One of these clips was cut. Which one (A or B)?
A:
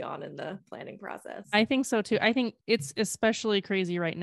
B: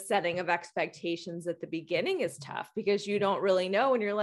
A